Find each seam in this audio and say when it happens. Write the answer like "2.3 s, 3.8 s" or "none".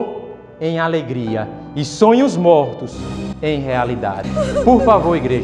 none